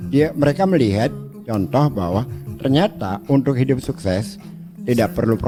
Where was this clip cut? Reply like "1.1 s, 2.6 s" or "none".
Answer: none